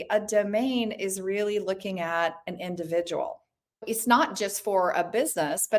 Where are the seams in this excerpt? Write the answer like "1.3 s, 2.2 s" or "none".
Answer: 3.8 s